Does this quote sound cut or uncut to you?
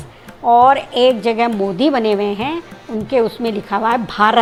uncut